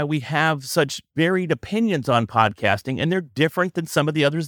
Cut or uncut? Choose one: cut